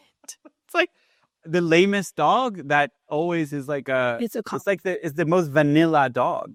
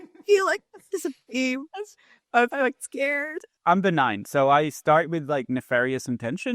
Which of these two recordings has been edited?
second; 1 cut; at 3.5 s

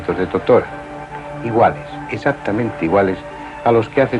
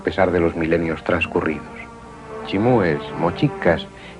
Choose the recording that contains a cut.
first; 1 cut; at 2.0 s

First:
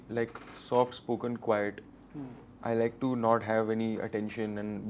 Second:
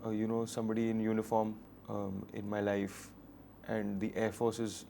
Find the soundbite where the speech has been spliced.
second; 1 cut; at 1.7 s

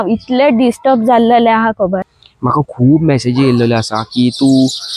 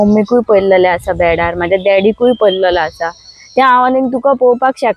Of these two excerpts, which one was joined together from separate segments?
first; 1 cut; at 2.0 s

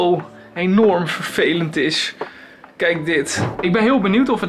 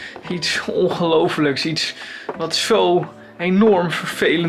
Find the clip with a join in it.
first; 1 cut; at 3.5 s

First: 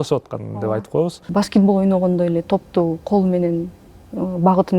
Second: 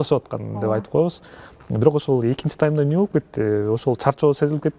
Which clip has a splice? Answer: first; 1 cut; at 1.2 s

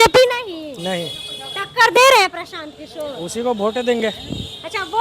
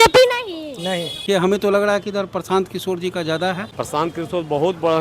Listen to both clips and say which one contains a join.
second; 2 cuts; at 1.1 s, 3.7 s

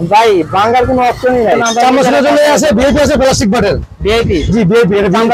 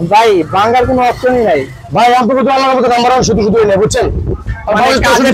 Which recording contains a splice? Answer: first; 1 cut; at 1.6 s

